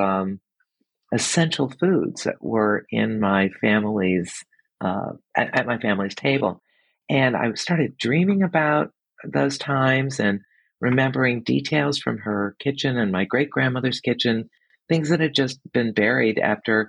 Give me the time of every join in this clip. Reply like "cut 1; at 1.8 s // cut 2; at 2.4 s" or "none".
none